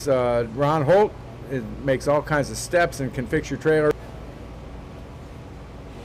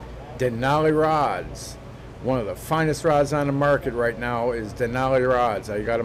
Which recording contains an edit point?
first; 1 cut; at 3.9 s

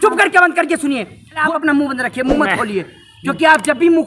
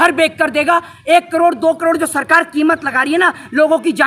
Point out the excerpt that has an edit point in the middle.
first; 1 cut; at 1.4 s

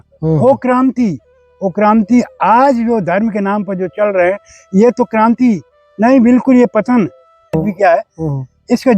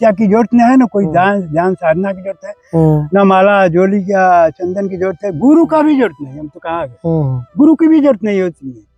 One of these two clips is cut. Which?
first; 1 cut; at 7.6 s

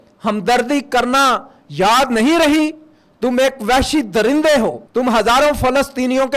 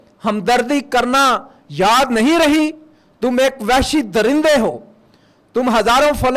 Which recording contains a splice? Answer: first; 1 cut; at 4.8 s

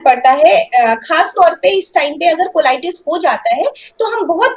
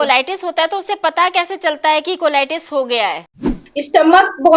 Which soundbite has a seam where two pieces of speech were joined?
second; 1 cut; at 3.6 s

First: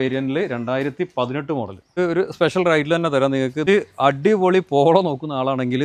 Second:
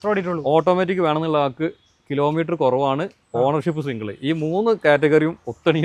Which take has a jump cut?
first; 2 cuts; at 1.9 s, 3.6 s

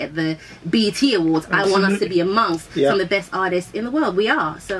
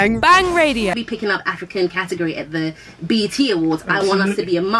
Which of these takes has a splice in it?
second; 1 cut; at 1.0 s

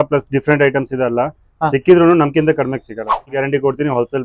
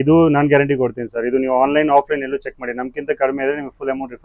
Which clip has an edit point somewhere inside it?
first; 1 cut; at 3.3 s

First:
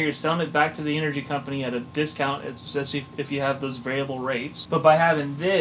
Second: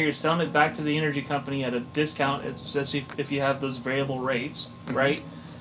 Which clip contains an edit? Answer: first; 1 cut; at 4.5 s

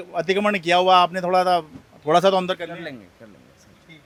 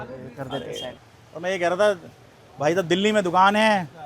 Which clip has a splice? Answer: second; 1 cut; at 1.0 s

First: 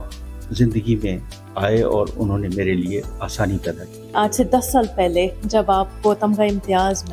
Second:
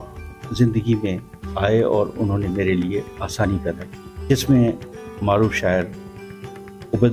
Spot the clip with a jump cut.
first; 1 cut; at 4.1 s

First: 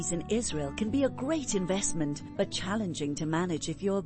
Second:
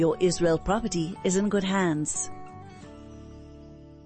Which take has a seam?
second; 1 cut; at 2.1 s

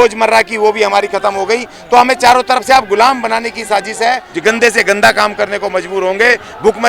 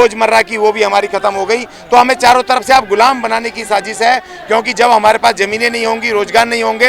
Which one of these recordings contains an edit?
first; 1 cut; at 4.3 s

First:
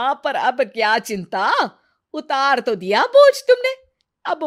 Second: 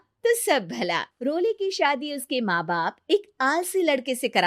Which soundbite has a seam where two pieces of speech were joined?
second; 1 cut; at 1.1 s

